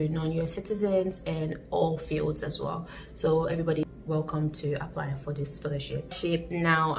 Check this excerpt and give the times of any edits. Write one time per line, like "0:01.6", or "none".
0:03.8
0:06.2